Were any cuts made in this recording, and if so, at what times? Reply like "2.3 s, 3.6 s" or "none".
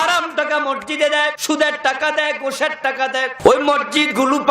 1.4 s, 3.3 s